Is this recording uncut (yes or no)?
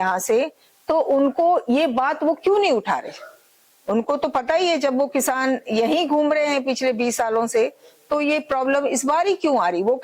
yes